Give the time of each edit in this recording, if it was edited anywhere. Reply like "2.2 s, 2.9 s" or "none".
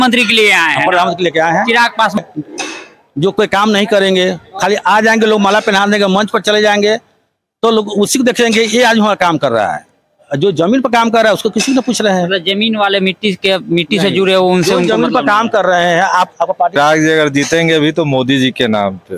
2.2 s, 16.8 s